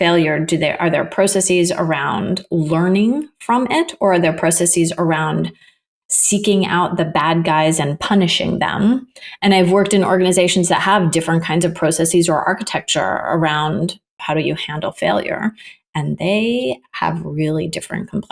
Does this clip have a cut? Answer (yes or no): yes